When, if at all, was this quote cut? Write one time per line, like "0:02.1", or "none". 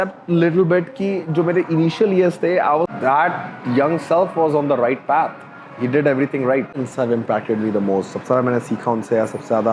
0:02.9
0:06.7